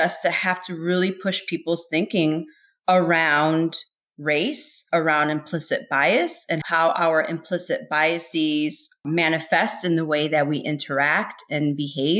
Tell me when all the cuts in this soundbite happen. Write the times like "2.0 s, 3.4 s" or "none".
6.7 s